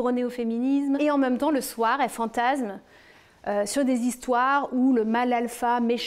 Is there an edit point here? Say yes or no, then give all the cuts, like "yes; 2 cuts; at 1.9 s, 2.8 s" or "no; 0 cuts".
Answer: yes; 1 cut; at 1.0 s